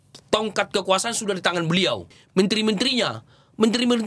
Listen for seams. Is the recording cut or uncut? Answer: cut